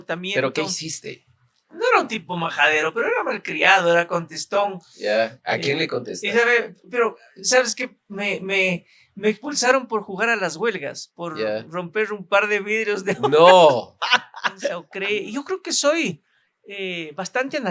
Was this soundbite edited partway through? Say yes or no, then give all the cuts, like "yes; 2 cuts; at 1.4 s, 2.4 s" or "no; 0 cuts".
yes; 1 cut; at 14.9 s